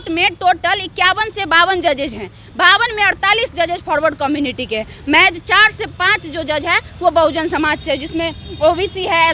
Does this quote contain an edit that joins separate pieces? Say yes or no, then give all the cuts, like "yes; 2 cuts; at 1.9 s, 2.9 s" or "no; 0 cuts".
no; 0 cuts